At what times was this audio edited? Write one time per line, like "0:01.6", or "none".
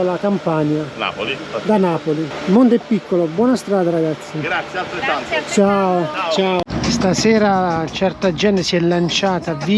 0:02.3
0:06.7